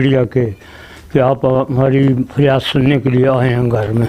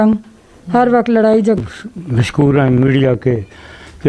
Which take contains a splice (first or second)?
second